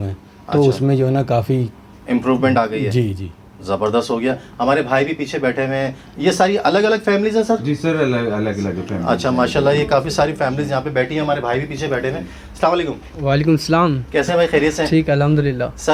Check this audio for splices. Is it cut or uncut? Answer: uncut